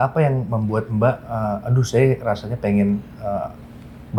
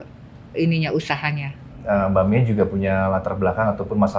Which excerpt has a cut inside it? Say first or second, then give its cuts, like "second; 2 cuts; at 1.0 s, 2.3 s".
second; 1 cut; at 1.7 s